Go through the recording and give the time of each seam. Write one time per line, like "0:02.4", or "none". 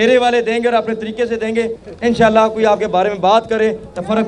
0:01.8